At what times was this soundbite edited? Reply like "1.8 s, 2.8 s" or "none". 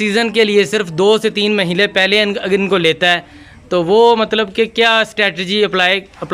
none

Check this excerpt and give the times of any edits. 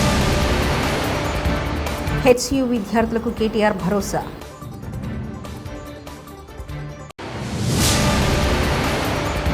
2.0 s

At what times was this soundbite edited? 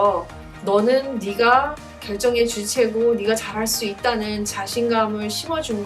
none

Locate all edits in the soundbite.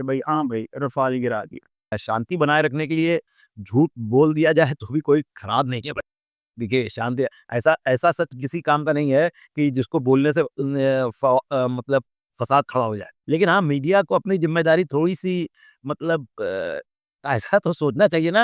2.0 s, 13.1 s

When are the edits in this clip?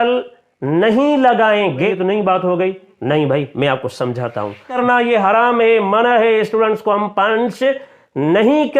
1.9 s, 4.7 s

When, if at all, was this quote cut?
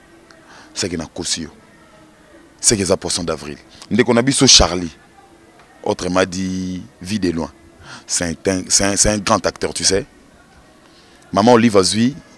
3.7 s

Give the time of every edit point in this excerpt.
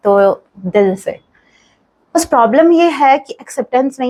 none

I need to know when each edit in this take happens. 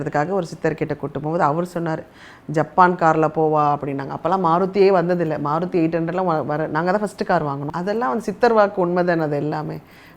7.7 s

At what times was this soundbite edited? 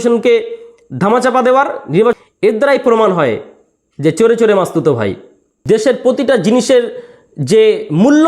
none

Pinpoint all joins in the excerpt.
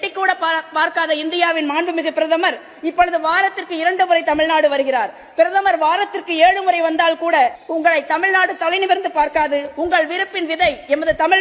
7.6 s

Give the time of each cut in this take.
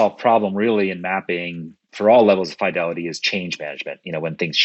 none

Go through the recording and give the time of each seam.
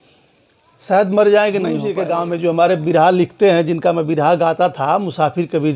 2.0 s

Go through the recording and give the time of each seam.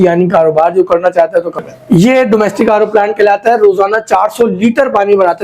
1.6 s

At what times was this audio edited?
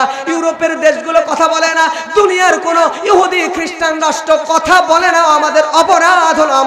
none

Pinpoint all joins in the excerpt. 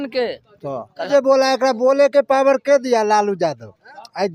1.1 s

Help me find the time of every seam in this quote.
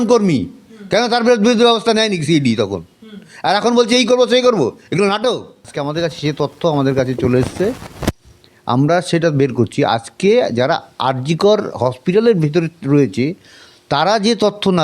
5.8 s

